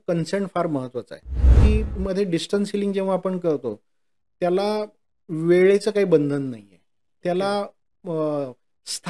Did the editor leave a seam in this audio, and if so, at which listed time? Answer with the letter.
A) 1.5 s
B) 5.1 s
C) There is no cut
A